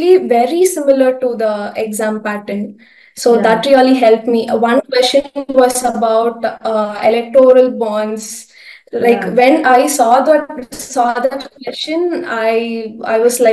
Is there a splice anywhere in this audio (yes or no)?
no